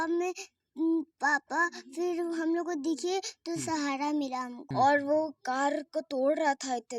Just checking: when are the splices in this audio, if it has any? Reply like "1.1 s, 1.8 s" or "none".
4.6 s